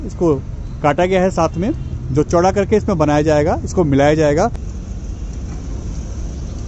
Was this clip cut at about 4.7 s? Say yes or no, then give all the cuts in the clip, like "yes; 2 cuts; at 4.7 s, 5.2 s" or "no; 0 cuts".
yes; 1 cut; at 4.7 s